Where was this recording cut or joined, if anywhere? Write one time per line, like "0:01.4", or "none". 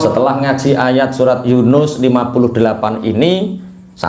none